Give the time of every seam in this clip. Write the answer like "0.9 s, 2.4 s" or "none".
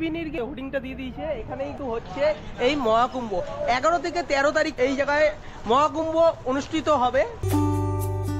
7.4 s